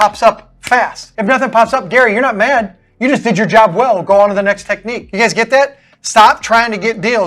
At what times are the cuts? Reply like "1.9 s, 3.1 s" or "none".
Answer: 1.0 s, 5.0 s